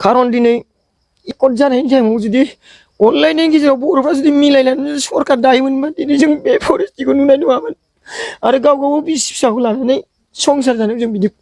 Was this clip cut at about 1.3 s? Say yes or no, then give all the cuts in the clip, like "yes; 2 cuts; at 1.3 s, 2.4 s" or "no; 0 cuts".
yes; 1 cut; at 1.3 s